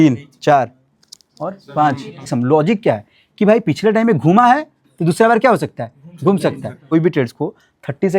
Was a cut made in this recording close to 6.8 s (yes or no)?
yes